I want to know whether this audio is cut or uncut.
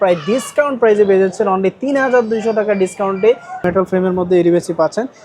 cut